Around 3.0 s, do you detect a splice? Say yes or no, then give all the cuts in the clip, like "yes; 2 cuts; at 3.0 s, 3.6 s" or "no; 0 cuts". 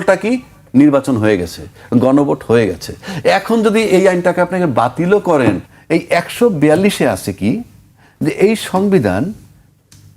no; 1 cut; at 5.7 s